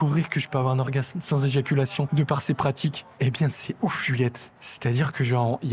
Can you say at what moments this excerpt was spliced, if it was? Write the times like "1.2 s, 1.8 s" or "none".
2.1 s, 3.1 s, 4.5 s